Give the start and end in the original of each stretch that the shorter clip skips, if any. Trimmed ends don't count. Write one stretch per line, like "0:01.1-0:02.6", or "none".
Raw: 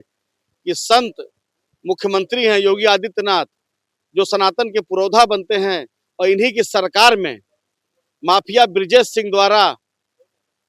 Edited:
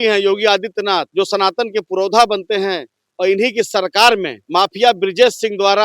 0:03.5-0:04.1
0:07.4-0:08.1